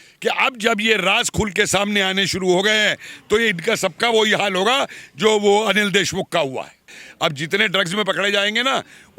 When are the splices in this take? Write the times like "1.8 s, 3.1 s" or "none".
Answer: 7.0 s